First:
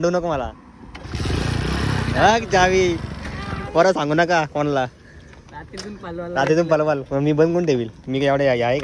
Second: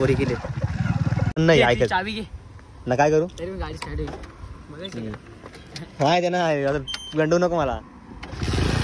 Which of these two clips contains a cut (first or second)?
second